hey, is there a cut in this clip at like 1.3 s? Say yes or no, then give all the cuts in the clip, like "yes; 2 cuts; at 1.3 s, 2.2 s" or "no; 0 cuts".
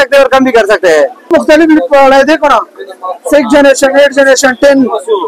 yes; 1 cut; at 1.3 s